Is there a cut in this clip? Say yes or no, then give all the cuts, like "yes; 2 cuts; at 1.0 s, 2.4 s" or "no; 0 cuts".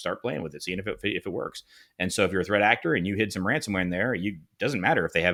no; 0 cuts